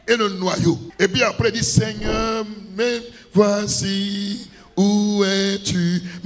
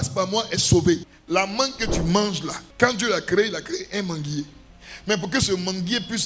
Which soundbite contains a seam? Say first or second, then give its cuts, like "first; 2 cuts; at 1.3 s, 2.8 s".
second; 1 cut; at 1.0 s